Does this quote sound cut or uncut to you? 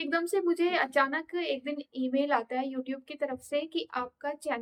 uncut